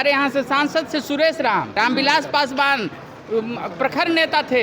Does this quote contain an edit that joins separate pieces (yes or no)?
yes